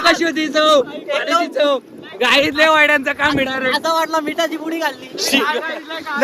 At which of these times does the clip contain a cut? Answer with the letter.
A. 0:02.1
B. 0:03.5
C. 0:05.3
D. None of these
C